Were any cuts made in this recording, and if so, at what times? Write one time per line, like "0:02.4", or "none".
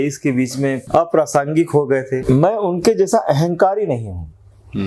0:00.8
0:02.2